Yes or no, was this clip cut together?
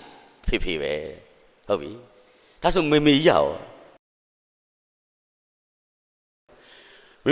no